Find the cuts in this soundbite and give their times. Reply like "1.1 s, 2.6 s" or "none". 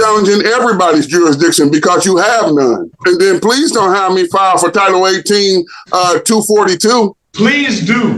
2.9 s, 7.2 s